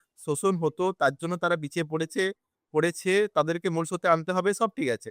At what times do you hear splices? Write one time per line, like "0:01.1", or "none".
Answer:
none